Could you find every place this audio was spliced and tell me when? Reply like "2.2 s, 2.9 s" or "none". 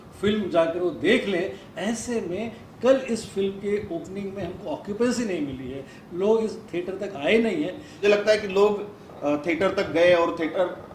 8.0 s